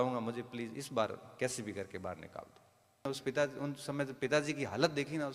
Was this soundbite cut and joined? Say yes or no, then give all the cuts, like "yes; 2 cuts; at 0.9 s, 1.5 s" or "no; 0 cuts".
yes; 1 cut; at 3.0 s